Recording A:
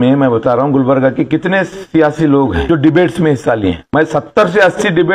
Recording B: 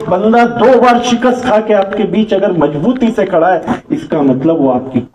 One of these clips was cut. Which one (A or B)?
A